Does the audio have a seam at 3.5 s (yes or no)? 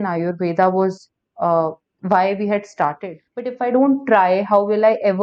yes